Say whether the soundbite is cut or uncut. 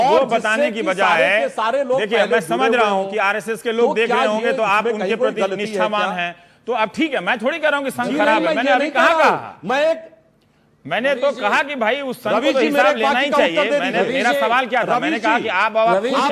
uncut